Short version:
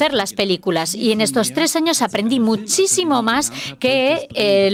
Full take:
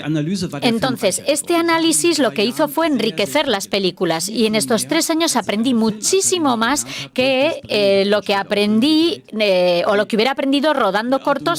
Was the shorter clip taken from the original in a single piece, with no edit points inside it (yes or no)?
yes